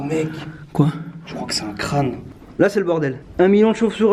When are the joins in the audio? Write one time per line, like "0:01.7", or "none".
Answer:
0:02.3
0:03.2